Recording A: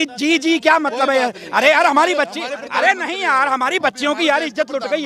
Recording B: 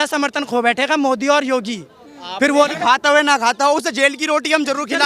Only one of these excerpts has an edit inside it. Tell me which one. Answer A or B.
B